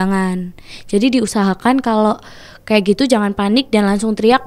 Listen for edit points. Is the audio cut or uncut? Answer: uncut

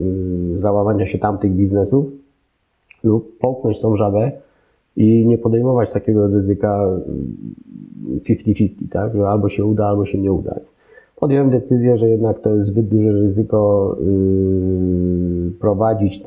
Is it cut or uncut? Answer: uncut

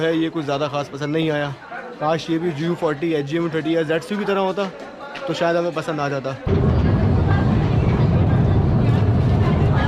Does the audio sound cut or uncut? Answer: cut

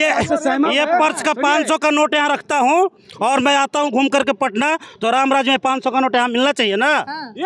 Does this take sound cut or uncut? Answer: uncut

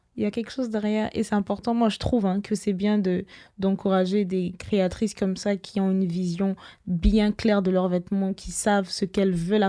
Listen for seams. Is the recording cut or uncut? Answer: uncut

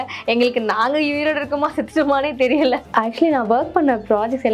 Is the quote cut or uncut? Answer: cut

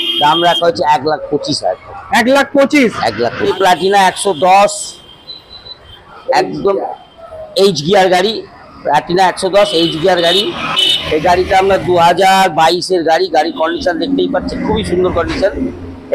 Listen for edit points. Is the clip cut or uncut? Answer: cut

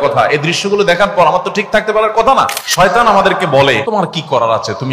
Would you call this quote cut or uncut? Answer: cut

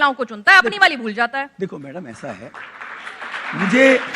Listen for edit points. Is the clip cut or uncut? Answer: uncut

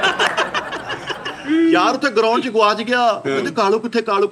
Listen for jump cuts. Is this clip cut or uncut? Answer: uncut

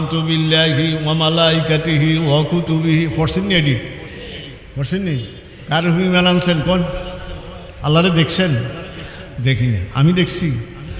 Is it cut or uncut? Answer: uncut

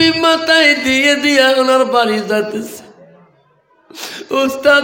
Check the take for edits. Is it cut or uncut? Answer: uncut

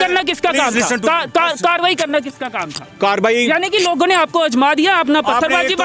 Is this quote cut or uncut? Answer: uncut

